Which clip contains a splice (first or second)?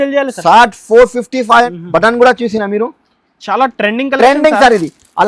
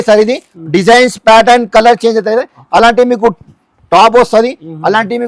first